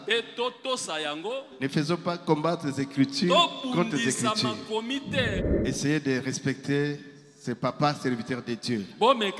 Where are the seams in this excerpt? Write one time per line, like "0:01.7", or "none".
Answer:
0:05.4